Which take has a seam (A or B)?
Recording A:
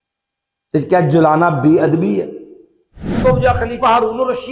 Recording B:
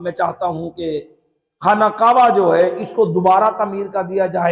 A